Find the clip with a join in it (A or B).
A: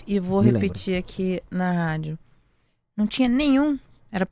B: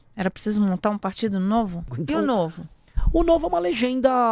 B